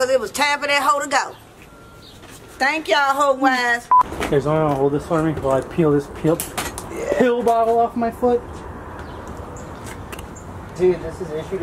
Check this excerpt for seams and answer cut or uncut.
cut